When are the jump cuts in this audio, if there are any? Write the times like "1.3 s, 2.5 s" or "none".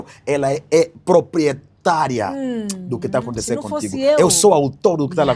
none